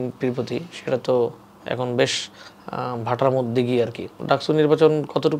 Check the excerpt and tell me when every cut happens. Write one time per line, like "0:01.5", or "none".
0:04.1

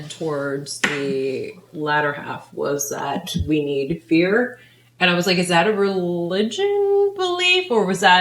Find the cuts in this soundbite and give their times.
none

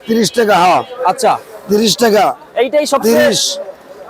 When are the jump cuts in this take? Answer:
none

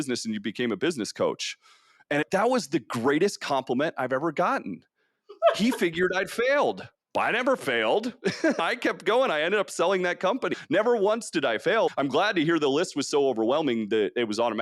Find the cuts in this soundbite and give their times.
0:10.5

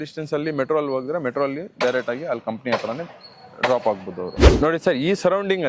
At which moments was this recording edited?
0:04.4

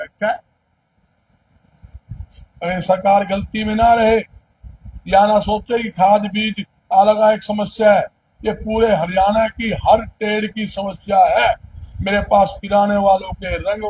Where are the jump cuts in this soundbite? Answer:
0:01.8

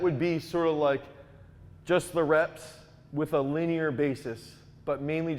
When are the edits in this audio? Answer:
none

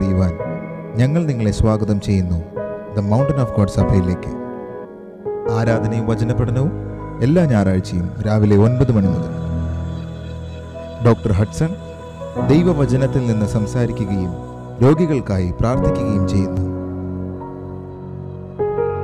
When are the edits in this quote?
0:04.8

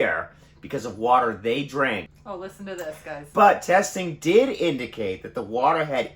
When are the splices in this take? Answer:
0:02.2

